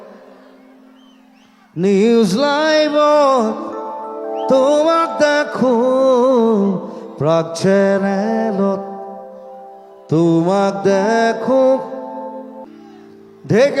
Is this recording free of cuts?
no; 1 cut; at 12.6 s

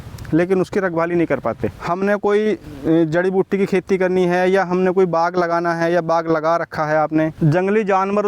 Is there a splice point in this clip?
yes; 2 cuts; at 1.7 s, 7.3 s

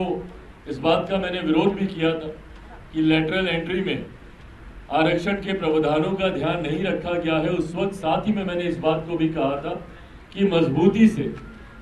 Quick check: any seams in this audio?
no; 0 cuts

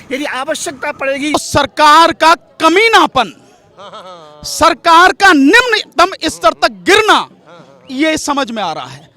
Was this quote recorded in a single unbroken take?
no; 1 cut; at 1.3 s

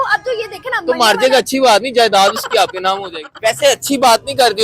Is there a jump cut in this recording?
yes; 1 cut; at 3.5 s

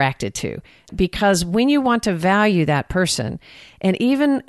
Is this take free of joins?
no; 1 cut; at 0.9 s

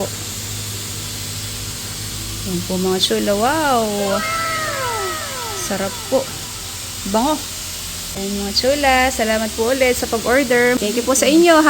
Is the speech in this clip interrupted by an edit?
yes; 2 cuts; at 8.2 s, 10.8 s

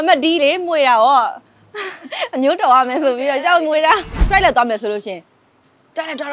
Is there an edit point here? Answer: yes; 1 cut; at 4.1 s

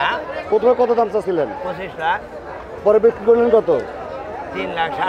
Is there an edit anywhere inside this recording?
no; 0 cuts

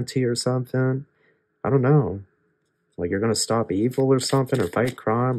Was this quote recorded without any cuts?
yes; 0 cuts

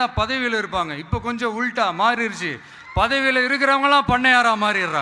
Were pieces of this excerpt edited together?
no; 0 cuts

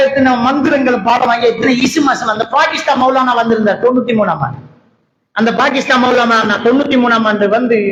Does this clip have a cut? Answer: no; 0 cuts

